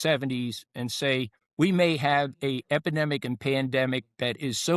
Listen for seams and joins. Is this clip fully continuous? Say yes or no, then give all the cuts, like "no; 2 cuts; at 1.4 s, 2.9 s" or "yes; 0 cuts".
no; 1 cut; at 1.4 s